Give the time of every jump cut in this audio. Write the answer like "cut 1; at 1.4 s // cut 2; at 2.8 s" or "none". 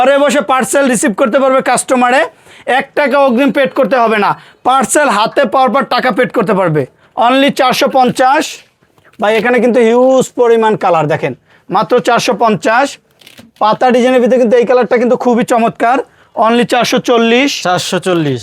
none